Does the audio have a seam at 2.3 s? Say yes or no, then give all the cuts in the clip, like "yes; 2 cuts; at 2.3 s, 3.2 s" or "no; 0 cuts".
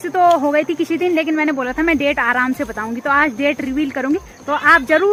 no; 0 cuts